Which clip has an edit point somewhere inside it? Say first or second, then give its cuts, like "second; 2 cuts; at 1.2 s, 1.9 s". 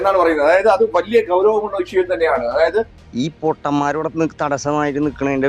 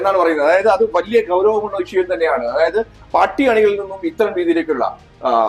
first; 1 cut; at 3.0 s